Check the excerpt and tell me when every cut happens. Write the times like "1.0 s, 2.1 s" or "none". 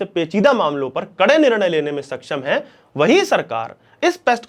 none